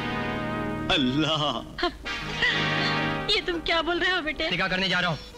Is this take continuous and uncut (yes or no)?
no